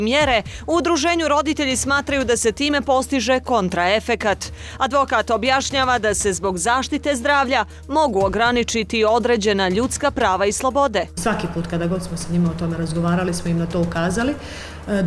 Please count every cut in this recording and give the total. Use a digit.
1